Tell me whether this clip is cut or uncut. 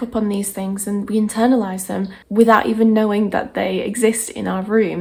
uncut